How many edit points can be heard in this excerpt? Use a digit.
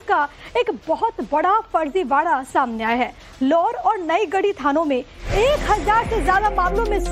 1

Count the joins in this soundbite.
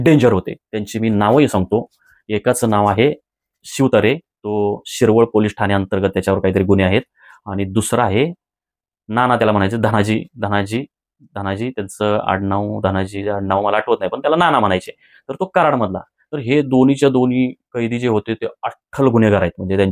0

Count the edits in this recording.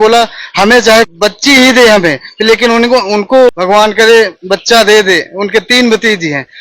2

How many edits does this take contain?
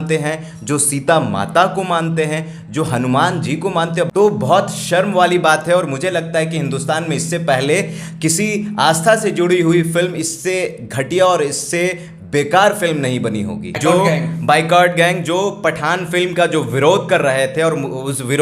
2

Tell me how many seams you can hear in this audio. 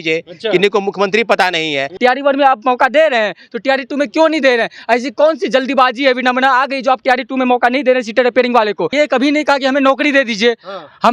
2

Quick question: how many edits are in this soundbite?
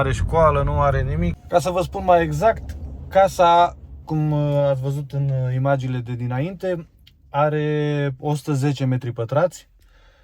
1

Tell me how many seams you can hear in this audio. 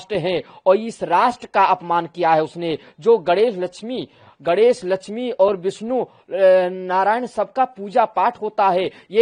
0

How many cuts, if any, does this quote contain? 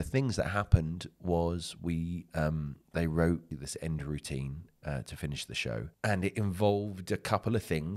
2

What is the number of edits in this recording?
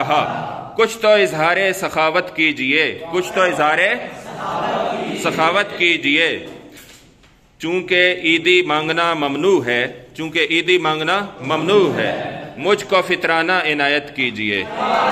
0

